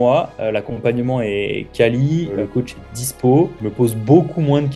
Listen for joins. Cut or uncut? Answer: cut